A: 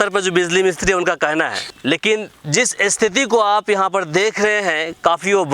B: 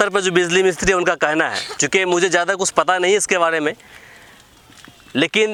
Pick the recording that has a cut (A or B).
A